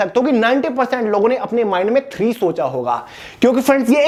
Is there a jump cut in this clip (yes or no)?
no